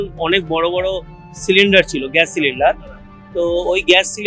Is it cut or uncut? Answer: uncut